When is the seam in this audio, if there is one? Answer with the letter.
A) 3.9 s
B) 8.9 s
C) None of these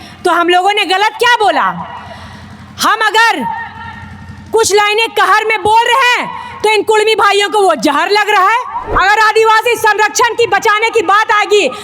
B